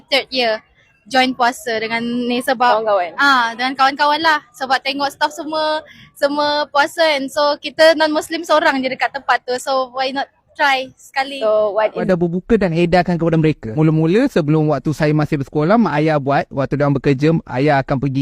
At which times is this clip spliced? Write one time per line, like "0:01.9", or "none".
0:12.0